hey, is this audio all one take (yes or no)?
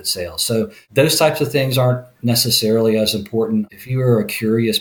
no